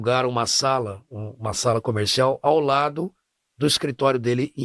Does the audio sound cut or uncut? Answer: uncut